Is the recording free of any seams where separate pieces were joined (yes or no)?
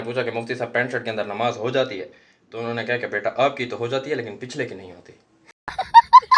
no